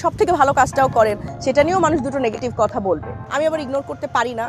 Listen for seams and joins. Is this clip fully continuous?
no; 1 cut; at 3.2 s

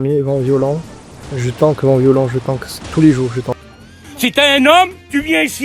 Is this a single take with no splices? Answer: yes; 0 cuts

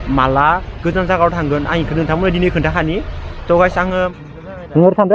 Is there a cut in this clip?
yes; 1 cut; at 4.2 s

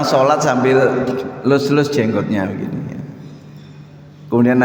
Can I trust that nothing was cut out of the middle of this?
yes; 0 cuts

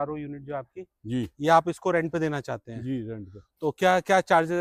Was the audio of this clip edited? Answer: no; 0 cuts

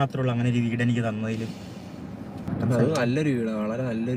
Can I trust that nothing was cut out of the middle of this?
no; 1 cut; at 2.5 s

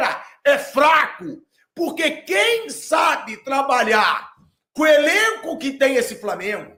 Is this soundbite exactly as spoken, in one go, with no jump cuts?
yes; 0 cuts

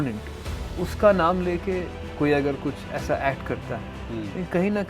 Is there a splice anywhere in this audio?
yes; 2 cuts; at 2.0 s, 3.9 s

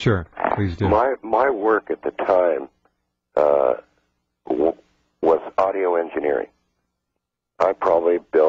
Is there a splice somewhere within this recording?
yes; 1 cut; at 6.5 s

